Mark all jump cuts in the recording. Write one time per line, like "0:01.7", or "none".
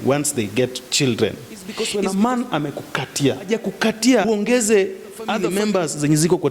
0:01.8
0:03.5
0:04.3
0:05.4